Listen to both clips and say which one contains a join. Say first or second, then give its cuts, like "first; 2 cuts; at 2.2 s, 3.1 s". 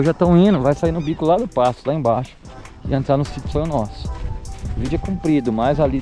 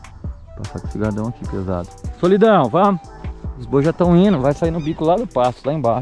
second; 1 cut; at 1.9 s